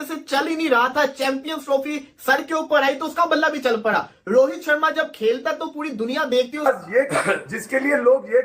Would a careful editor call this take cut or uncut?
cut